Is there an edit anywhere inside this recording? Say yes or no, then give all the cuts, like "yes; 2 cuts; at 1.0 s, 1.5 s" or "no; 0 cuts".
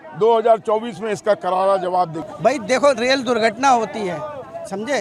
yes; 1 cut; at 2.2 s